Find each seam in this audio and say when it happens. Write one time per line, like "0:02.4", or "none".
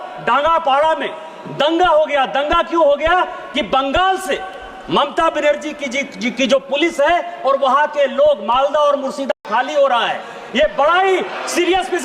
0:09.4